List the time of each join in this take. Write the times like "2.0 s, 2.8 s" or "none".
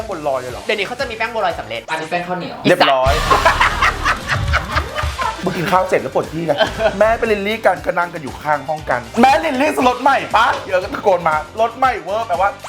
5.4 s